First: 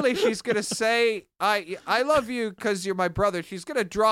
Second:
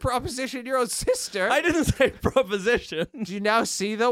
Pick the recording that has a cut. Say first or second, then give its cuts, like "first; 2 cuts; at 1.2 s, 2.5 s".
second; 1 cut; at 3.2 s